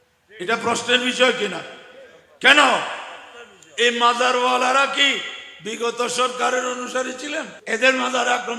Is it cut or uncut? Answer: cut